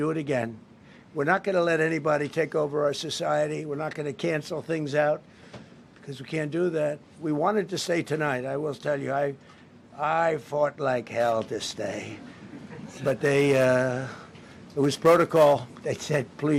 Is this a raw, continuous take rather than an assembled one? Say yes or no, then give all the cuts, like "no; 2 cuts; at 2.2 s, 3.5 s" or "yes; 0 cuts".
yes; 0 cuts